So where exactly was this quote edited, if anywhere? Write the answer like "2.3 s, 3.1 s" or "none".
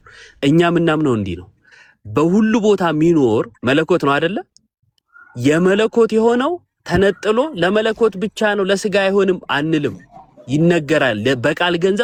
none